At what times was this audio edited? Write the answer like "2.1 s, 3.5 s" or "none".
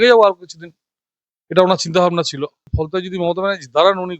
2.7 s